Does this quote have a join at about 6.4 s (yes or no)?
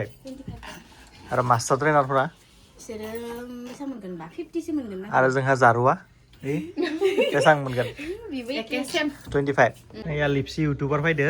no